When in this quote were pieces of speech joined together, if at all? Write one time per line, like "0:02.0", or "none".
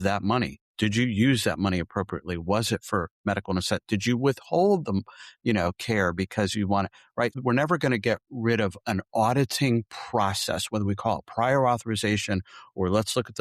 0:07.4